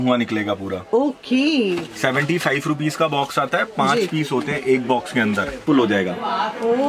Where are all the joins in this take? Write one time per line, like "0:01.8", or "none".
0:05.6